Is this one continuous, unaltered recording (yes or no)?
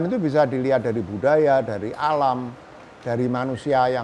yes